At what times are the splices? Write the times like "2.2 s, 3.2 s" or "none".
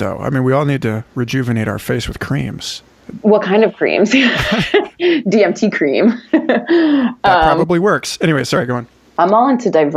9.0 s